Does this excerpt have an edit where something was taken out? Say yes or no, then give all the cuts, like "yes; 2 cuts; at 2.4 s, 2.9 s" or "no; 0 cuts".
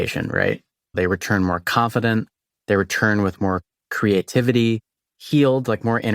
yes; 1 cut; at 0.9 s